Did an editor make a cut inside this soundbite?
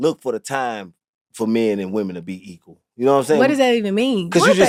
no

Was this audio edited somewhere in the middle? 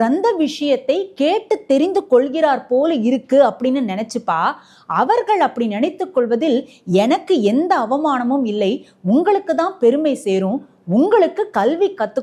no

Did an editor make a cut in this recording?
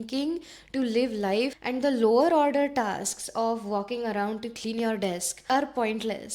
yes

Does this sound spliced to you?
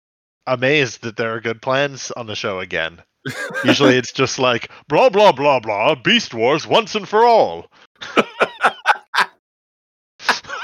no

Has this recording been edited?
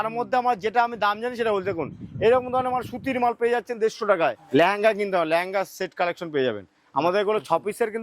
yes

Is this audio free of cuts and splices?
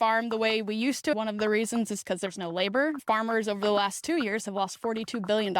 no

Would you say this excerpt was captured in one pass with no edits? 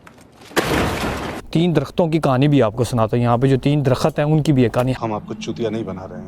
no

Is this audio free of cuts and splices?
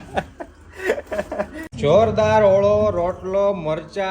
no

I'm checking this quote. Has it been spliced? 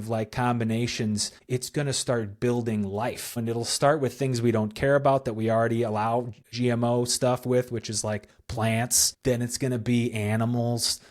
yes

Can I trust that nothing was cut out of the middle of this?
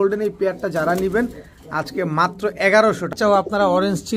no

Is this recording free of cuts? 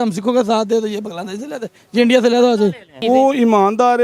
no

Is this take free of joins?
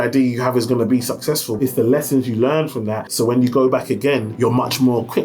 no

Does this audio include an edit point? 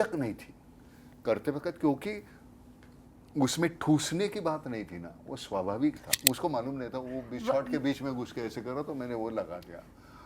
yes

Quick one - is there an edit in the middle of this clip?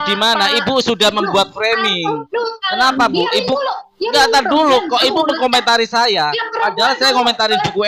no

